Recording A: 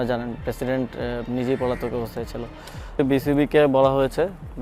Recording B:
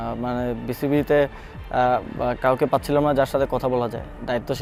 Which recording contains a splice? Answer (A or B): A